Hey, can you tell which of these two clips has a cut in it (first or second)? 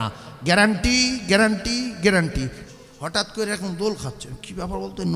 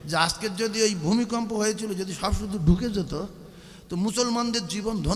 first